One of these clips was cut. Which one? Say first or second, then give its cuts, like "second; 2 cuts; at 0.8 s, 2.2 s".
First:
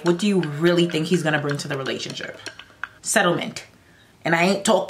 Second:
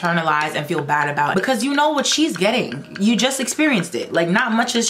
second; 1 cut; at 1.3 s